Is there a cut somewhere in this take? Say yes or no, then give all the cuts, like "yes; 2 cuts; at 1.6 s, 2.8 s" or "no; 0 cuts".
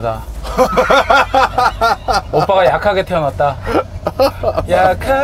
no; 0 cuts